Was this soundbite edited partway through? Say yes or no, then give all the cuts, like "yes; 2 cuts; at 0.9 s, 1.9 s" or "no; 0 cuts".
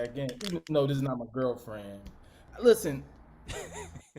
yes; 1 cut; at 2.4 s